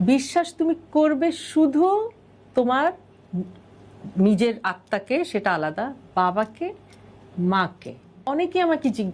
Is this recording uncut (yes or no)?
no